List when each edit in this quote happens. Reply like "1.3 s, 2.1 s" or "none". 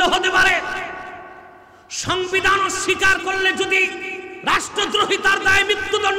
none